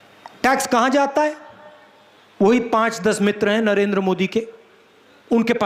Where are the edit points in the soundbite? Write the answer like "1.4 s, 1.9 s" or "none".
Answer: none